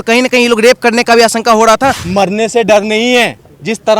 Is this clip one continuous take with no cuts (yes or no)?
no